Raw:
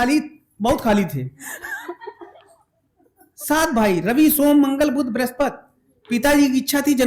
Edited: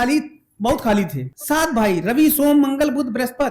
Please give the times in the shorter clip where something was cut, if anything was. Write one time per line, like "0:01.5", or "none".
0:01.3